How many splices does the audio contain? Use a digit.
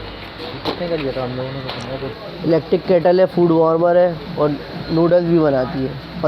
1